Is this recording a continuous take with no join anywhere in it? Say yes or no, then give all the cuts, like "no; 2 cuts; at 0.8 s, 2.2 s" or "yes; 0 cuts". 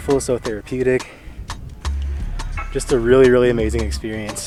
yes; 0 cuts